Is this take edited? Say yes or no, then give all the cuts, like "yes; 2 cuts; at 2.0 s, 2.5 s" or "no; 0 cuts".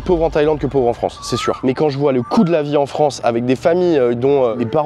yes; 1 cut; at 1.6 s